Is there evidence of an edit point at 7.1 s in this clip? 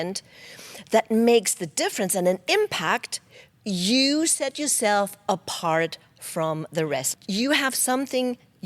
yes; 1 cut; at 7.1 s

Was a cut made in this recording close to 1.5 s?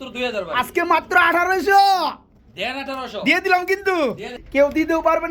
no; 1 cut; at 4.3 s

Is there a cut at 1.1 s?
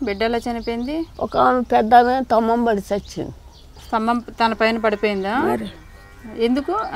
yes; 1 cut; at 1.1 s

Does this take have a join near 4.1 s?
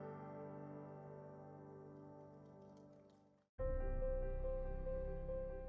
no; 1 cut; at 1.5 s

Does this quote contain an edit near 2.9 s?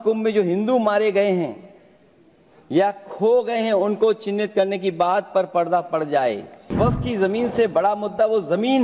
no; 1 cut; at 6.7 s

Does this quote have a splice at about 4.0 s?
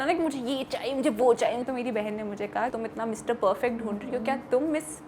no; 2 cuts; at 1.6 s, 2.8 s

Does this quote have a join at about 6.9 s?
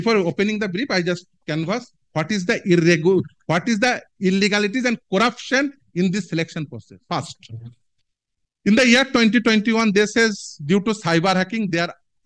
yes; 1 cut; at 6.9 s

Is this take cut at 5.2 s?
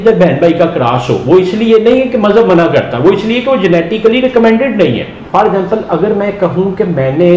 yes; 1 cut; at 5.2 s

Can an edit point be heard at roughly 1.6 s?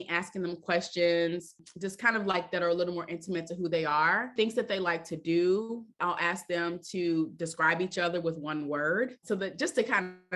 yes; 4 cuts; at 1.6 s, 4.3 s, 5.9 s, 9.2 s

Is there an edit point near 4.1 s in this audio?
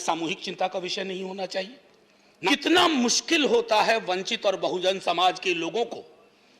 no; 1 cut; at 2.5 s

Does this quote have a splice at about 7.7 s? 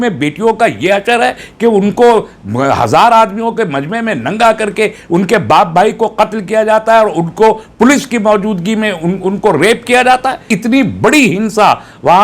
no; 1 cut; at 10.5 s

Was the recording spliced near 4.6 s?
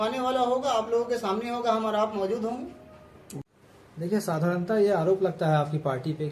no; 1 cut; at 3.4 s

